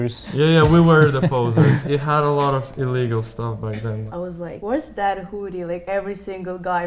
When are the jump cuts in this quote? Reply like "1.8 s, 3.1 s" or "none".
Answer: 1.8 s, 4.1 s